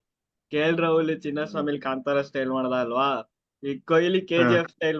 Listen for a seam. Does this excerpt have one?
no; 0 cuts

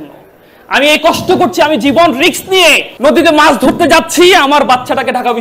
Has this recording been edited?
yes; 1 cut; at 2.9 s

